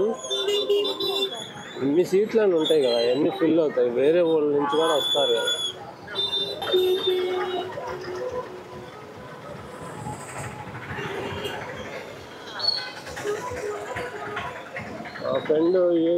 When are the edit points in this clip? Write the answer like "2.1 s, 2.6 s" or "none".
6.6 s

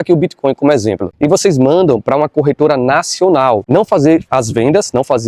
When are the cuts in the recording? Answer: 3.6 s

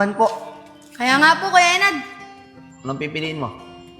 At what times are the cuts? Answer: 2.4 s

